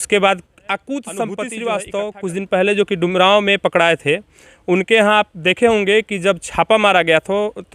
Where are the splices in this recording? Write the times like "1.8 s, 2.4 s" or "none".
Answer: 1.2 s